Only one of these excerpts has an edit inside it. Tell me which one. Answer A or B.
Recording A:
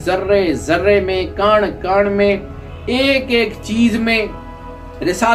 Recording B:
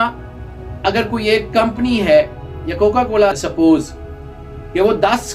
B